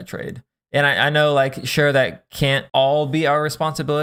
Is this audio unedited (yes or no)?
yes